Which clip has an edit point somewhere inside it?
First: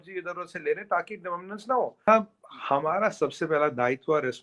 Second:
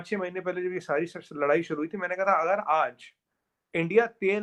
first; 1 cut; at 2.1 s

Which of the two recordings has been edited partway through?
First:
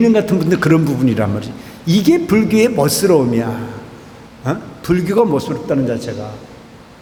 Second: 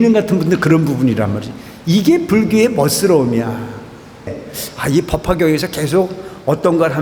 second; 1 cut; at 4.4 s

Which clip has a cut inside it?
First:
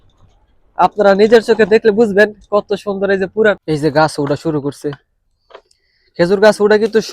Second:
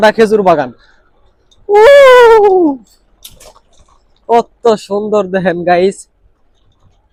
first; 1 cut; at 3.6 s

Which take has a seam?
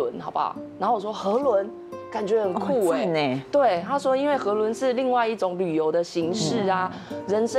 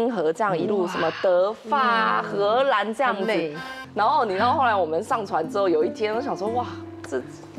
second; 1 cut; at 3.6 s

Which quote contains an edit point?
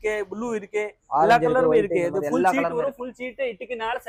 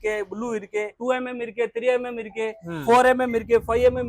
second; 1 cut; at 1.0 s

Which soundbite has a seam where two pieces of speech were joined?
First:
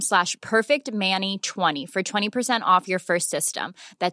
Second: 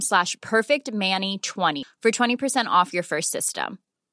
second; 1 cut; at 1.8 s

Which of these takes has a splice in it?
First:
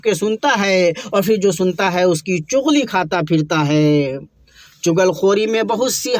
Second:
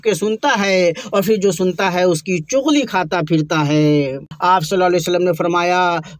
second; 1 cut; at 4.3 s

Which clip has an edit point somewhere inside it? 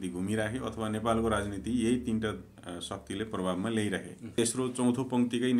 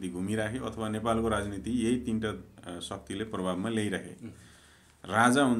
first; 1 cut; at 4.2 s

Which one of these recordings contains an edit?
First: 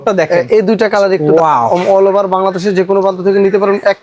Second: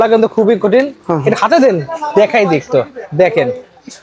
first; 1 cut; at 1.2 s

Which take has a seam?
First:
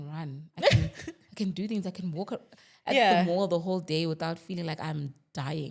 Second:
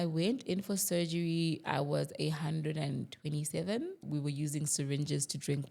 second; 1 cut; at 4.0 s

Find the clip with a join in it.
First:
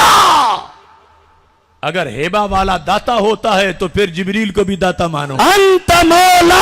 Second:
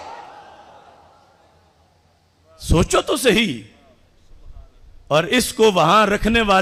first; 1 cut; at 5.3 s

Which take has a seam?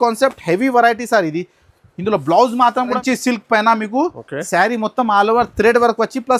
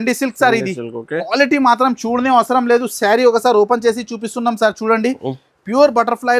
first; 1 cut; at 3.0 s

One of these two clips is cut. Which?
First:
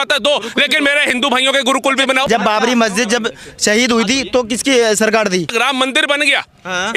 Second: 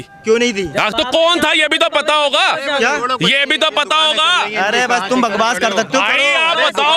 first; 2 cuts; at 2.3 s, 5.5 s

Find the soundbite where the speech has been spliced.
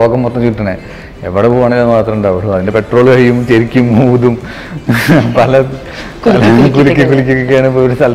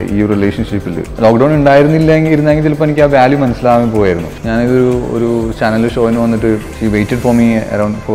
second; 3 cuts; at 1.1 s, 4.3 s, 6.7 s

